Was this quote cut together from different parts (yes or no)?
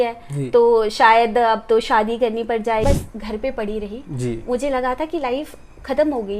yes